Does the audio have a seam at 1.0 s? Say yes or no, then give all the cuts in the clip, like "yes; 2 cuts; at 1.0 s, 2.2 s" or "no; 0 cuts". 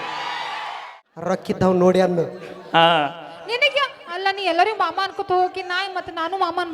yes; 1 cut; at 1.0 s